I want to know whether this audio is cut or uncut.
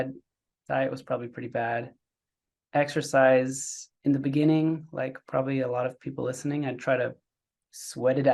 uncut